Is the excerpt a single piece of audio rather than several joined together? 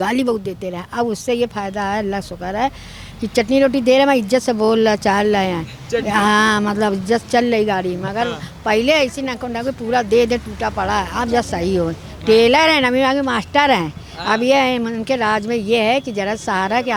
yes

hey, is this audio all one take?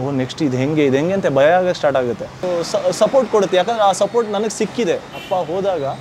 no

